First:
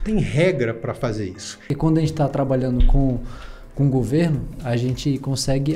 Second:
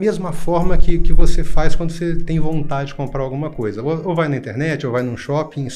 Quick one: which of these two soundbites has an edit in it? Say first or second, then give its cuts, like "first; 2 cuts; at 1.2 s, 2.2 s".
first; 1 cut; at 1.7 s